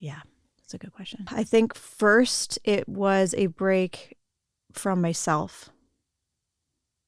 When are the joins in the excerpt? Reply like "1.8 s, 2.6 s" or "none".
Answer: 1.3 s